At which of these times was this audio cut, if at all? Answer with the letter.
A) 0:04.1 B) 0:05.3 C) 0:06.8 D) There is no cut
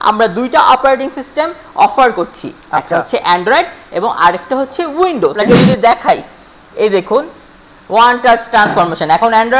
B